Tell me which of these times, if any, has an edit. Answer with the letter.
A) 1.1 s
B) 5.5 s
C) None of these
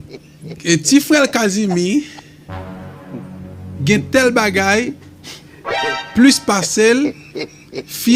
C